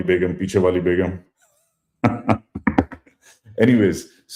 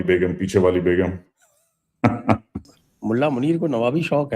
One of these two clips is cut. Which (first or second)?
second